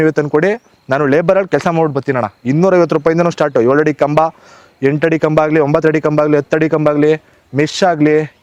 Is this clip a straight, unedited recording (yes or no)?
yes